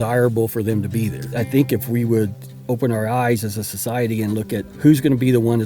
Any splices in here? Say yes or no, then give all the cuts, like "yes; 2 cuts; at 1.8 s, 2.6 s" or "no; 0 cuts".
yes; 3 cuts; at 1.2 s, 2.5 s, 4.7 s